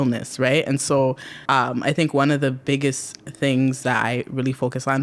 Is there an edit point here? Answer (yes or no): no